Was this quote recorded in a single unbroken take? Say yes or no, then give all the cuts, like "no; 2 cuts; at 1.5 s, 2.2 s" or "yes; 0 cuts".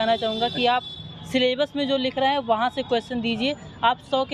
yes; 0 cuts